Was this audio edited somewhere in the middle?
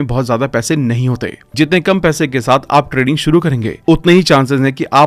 no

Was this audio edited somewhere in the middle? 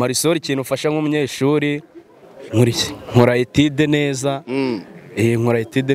no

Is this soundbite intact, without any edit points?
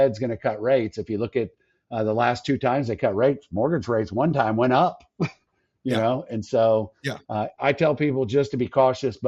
yes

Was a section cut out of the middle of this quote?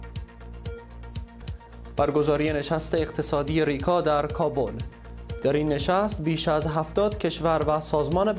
yes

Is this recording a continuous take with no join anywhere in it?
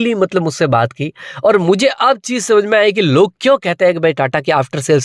yes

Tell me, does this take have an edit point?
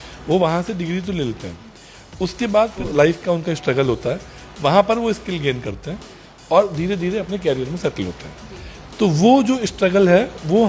yes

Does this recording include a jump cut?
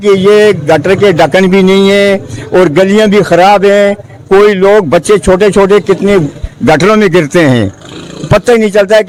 no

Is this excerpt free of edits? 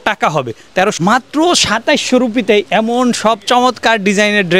no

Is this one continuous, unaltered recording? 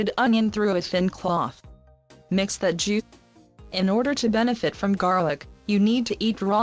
yes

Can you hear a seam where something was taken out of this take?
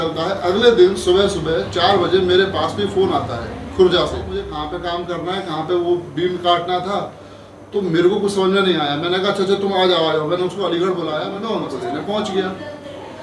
yes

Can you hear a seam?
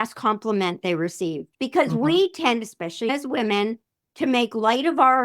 yes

